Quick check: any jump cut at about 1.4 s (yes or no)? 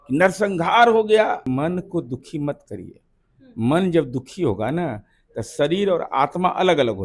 yes